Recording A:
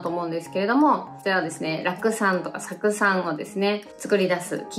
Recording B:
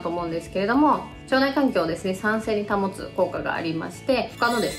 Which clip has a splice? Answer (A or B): B